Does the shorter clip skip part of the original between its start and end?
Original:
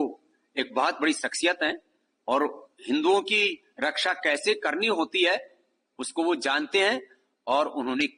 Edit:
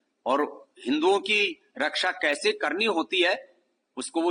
no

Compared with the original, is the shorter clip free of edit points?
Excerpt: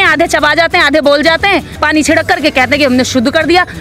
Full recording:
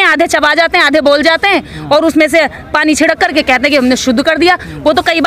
no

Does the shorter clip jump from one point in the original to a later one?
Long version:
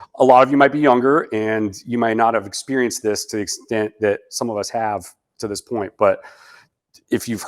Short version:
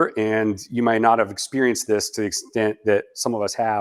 no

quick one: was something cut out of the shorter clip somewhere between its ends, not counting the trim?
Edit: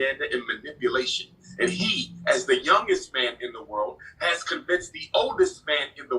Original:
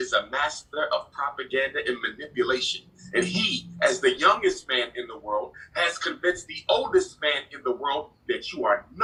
no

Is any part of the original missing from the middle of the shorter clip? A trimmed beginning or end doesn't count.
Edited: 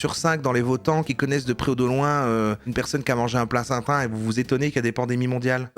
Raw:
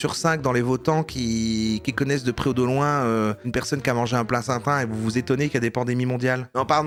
yes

